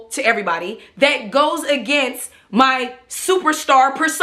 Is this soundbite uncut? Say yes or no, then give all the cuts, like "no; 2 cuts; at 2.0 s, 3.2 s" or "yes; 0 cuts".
yes; 0 cuts